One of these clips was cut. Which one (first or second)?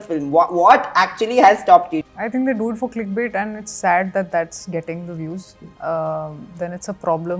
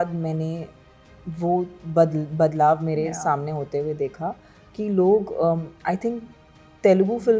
first